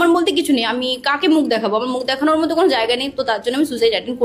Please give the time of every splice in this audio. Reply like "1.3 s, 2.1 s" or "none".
none